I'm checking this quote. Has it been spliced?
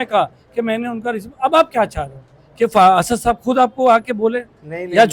no; 0 cuts

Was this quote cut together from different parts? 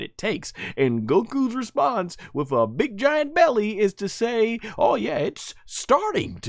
no; 0 cuts

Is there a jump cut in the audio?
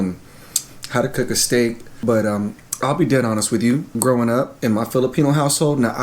yes; 3 cuts; at 1.9 s, 3.9 s, 4.5 s

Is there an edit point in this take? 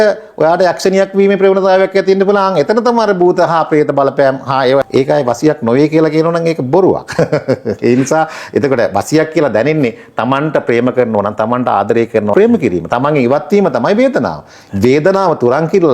yes; 2 cuts; at 4.9 s, 12.3 s

